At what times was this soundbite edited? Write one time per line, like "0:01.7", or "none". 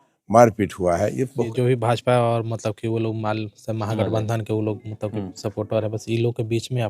0:01.5

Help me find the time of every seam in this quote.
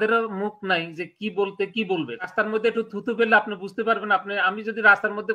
0:02.2

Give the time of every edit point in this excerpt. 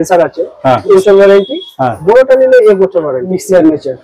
0:00.9
0:03.3

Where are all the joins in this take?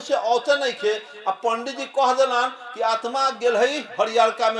none

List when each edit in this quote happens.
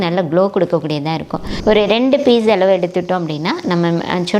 0:01.5

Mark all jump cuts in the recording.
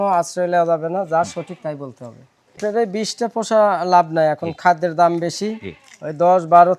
0:02.4

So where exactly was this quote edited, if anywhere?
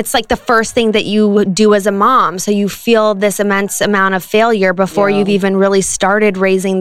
none

